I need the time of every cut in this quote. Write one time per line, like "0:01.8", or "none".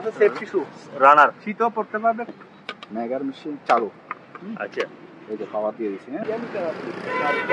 0:02.4
0:06.2